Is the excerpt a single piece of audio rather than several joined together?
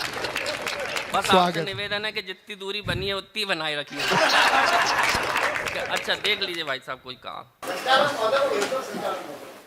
no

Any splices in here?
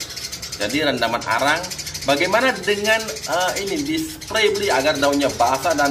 no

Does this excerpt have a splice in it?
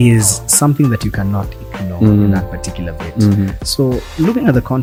no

